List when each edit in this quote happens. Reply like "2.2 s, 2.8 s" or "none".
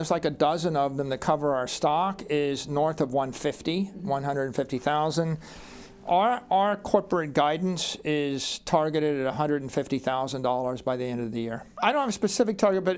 none

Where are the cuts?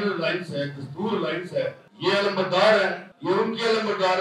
1.9 s, 3.1 s

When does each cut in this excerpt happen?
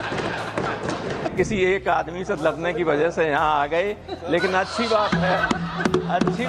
1.3 s

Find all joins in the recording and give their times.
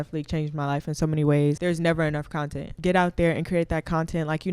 2.2 s

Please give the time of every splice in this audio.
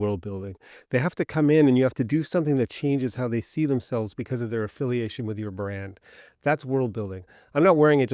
none

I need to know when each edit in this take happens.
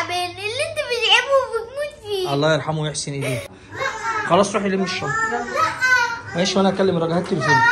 3.5 s

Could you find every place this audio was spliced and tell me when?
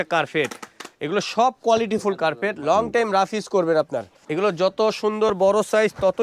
4.2 s

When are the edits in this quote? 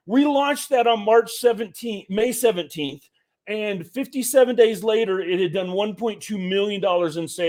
none

